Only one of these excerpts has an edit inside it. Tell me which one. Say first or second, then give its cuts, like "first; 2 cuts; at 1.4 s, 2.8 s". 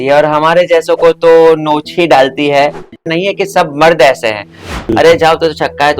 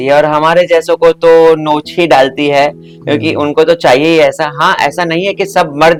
first; 2 cuts; at 3.0 s, 4.9 s